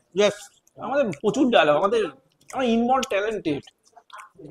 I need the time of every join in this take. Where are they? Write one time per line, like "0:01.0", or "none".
none